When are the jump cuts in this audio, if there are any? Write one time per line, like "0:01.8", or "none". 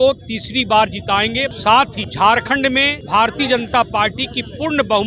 0:01.6
0:03.0